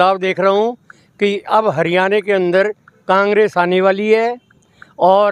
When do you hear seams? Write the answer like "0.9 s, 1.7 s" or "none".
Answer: none